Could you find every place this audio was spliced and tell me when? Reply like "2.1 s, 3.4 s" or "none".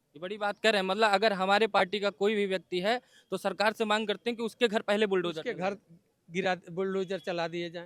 none